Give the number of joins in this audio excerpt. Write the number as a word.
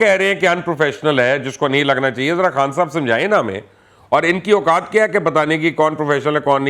zero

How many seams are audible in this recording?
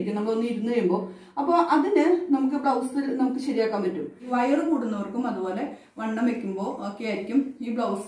one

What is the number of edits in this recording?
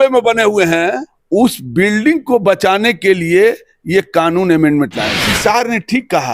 two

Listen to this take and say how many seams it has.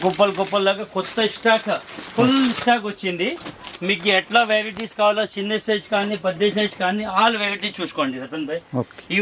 zero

